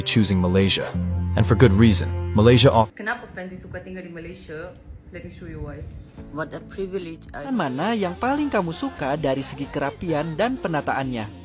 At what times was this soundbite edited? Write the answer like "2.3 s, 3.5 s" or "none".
2.9 s, 7.5 s